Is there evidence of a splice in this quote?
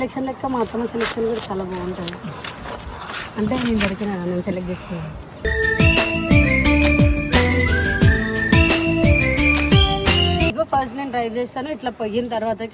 yes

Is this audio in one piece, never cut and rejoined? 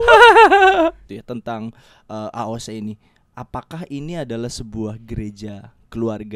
no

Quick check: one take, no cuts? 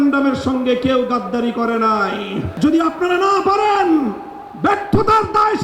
no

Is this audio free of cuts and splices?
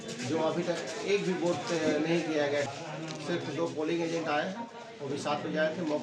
yes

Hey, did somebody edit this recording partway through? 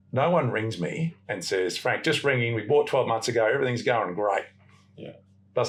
no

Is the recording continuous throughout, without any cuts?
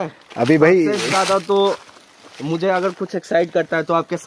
yes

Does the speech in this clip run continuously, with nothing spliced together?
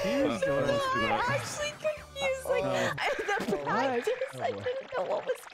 no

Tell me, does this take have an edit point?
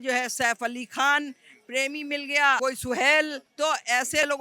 yes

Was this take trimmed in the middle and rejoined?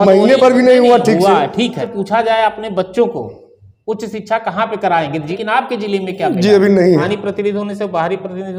yes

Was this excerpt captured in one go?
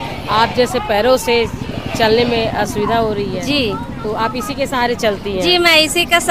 yes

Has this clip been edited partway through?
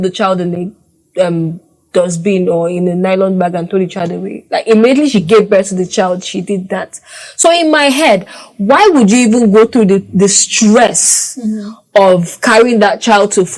no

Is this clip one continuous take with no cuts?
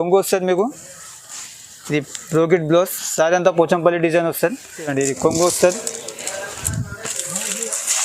no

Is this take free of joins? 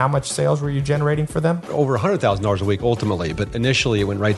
no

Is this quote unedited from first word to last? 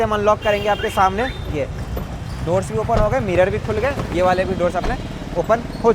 yes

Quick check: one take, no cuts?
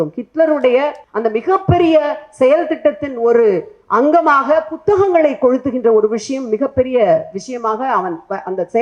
no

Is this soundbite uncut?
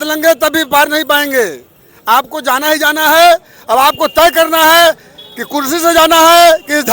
yes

